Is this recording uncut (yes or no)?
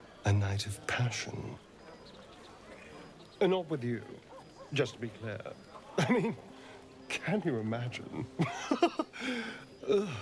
no